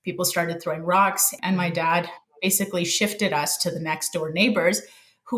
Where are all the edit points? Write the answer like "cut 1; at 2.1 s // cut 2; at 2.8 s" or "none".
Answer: cut 1; at 1.3 s